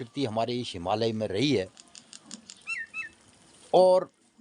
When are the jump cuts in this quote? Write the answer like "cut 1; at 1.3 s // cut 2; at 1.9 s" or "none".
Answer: none